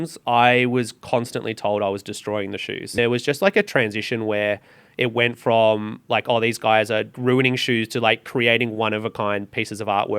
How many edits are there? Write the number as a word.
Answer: two